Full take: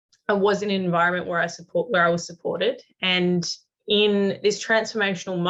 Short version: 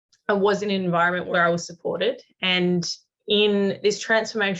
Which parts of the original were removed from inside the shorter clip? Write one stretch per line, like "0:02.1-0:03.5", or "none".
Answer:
0:01.3-0:01.9